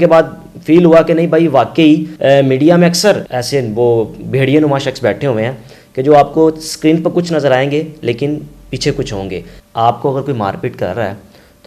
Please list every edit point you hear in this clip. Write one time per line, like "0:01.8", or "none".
0:02.1
0:03.3
0:09.5

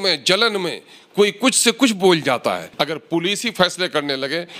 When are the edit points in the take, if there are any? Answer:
0:02.7

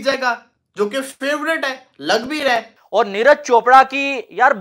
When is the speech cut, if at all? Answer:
0:02.8

